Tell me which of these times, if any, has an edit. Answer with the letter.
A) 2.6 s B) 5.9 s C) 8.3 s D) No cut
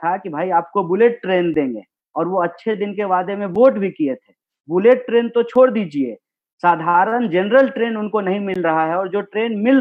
D